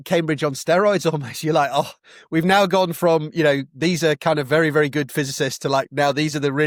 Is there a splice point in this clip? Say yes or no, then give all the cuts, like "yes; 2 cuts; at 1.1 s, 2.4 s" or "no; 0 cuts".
no; 0 cuts